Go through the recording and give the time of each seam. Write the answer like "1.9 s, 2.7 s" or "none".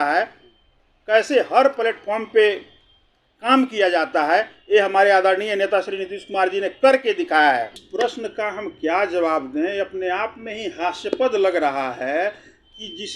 7.8 s